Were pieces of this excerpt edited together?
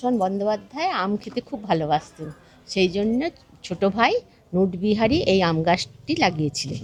no; 0 cuts

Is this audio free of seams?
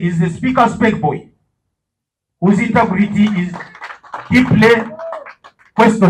yes; 0 cuts

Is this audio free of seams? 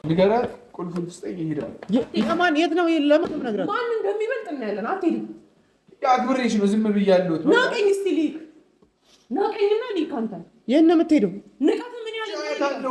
yes; 0 cuts

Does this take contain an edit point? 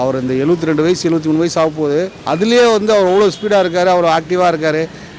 yes; 1 cut; at 2.2 s

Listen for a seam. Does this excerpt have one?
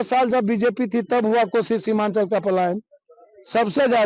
no; 0 cuts

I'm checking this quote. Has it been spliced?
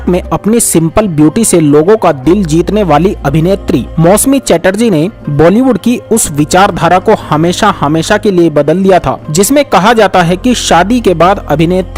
no; 0 cuts

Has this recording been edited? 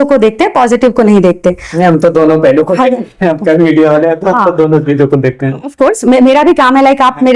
no; 0 cuts

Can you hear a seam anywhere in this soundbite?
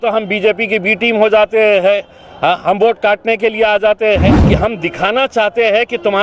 yes; 1 cut; at 4.4 s

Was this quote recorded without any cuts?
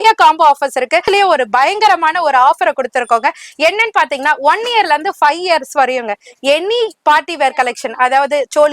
no; 1 cut; at 1.1 s

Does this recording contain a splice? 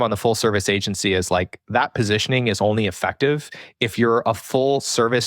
no; 0 cuts

